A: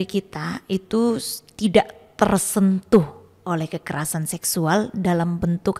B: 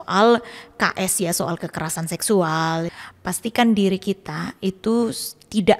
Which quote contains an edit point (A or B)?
B